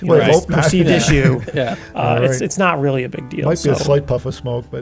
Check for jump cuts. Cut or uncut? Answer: uncut